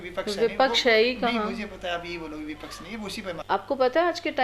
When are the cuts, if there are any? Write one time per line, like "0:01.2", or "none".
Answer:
0:03.3